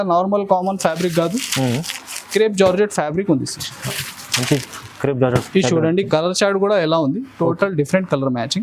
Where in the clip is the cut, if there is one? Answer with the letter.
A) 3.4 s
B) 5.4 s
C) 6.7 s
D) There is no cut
D